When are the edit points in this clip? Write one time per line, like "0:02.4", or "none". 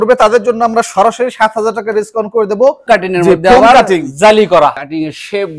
0:02.8
0:04.8